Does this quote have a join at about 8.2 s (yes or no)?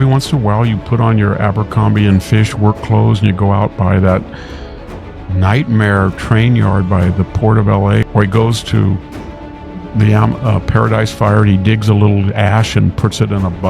yes